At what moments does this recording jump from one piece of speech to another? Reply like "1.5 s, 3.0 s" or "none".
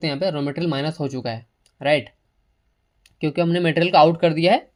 none